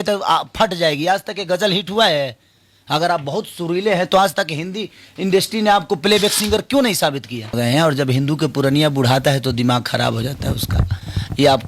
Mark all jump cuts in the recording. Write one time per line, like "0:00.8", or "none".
0:07.5